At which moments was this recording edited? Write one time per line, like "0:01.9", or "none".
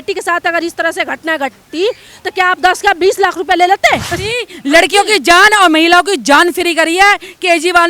0:04.1